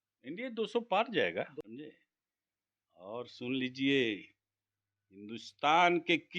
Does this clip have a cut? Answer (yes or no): yes